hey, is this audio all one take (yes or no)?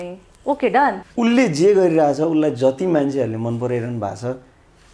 no